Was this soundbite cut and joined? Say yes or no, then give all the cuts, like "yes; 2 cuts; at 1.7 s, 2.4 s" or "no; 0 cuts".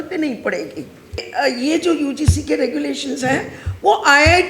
yes; 1 cut; at 1.3 s